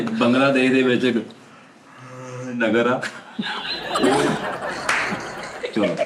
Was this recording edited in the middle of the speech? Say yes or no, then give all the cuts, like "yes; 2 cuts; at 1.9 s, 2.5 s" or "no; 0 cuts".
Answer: no; 0 cuts